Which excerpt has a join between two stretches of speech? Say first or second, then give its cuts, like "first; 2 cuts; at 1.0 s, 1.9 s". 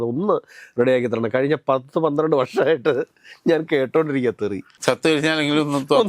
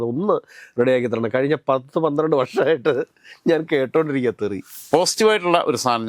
second; 1 cut; at 4.7 s